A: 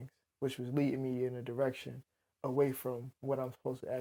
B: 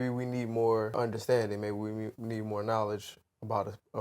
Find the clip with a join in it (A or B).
B